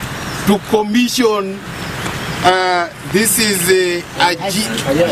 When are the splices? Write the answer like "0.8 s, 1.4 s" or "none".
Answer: none